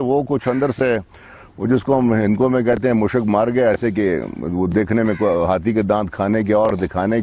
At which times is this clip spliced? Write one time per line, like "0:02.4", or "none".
none